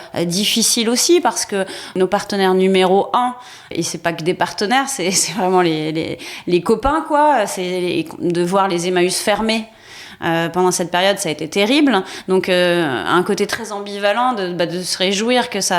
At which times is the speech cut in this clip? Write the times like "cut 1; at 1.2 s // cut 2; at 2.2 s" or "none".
cut 1; at 1.9 s // cut 2; at 3.7 s